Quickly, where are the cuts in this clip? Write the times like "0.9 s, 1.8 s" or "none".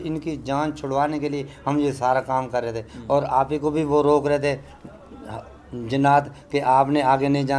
none